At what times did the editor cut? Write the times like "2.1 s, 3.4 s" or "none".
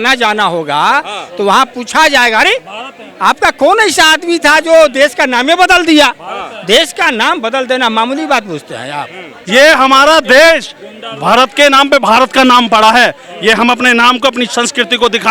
9.4 s